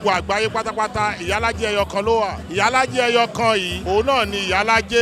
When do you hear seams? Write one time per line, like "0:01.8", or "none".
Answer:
0:02.4
0:03.7